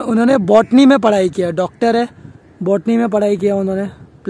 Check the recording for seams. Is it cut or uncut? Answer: uncut